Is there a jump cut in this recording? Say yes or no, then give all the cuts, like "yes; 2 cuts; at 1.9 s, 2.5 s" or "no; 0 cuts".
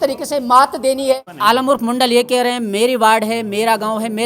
yes; 1 cut; at 1.3 s